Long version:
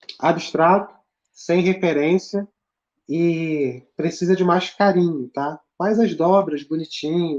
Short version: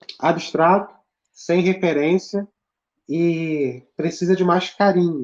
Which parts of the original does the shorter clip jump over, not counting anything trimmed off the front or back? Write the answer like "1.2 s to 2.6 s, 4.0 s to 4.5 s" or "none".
none